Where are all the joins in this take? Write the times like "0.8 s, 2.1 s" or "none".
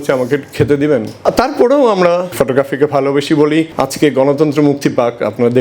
1.2 s, 2.3 s, 3.7 s